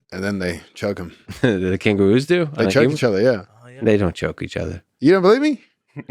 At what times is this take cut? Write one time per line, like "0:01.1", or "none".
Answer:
0:01.3